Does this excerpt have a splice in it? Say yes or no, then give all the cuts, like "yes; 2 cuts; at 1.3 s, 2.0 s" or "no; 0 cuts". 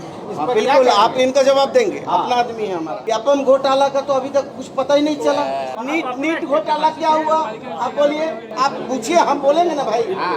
yes; 2 cuts; at 5.7 s, 8.5 s